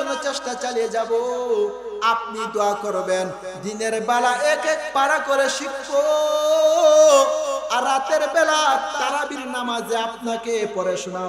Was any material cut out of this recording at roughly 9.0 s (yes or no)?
yes